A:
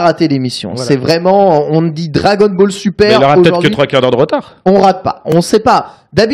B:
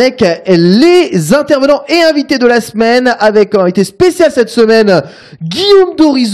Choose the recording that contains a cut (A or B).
B